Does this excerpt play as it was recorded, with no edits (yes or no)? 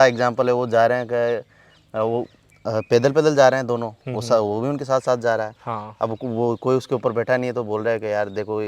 yes